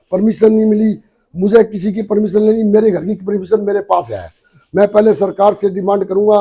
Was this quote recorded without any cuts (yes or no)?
yes